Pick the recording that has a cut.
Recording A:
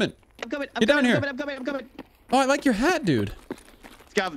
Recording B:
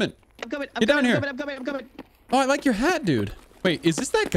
B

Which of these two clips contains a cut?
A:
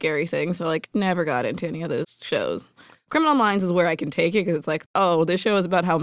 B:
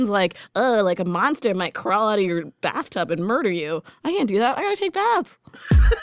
A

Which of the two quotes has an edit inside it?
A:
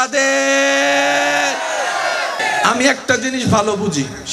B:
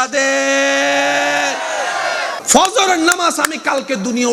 B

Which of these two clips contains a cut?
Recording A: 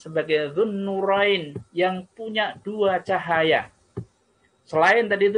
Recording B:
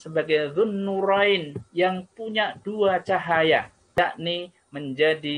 B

